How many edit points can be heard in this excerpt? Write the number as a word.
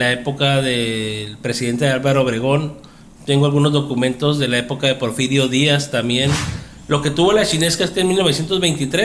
one